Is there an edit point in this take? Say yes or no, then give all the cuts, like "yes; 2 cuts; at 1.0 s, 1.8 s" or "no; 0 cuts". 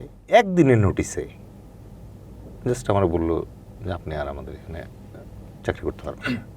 no; 0 cuts